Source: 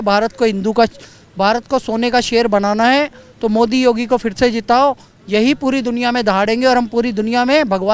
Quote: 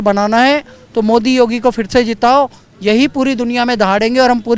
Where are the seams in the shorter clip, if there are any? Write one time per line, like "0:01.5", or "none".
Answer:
none